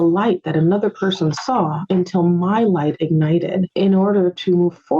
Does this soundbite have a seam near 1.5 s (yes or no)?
no